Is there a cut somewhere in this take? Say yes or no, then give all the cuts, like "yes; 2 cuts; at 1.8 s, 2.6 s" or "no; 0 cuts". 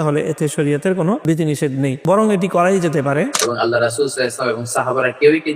yes; 2 cuts; at 1.6 s, 3.4 s